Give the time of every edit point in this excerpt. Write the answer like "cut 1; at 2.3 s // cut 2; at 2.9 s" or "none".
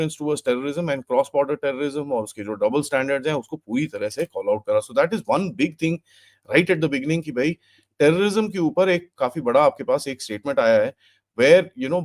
none